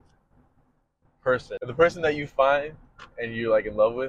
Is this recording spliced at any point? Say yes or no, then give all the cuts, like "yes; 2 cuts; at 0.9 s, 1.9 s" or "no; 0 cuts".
yes; 1 cut; at 1.6 s